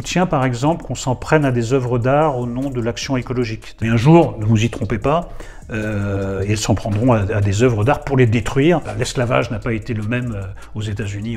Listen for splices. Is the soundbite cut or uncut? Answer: cut